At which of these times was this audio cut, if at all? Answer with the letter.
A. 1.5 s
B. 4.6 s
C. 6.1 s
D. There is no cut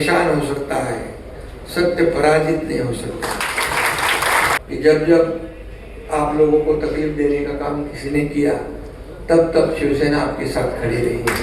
B